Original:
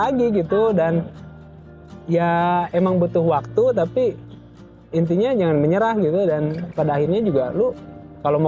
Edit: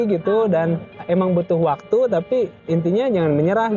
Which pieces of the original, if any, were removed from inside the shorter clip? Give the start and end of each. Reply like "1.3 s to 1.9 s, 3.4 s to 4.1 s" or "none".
1.3 s to 2.7 s, 4.2 s to 4.8 s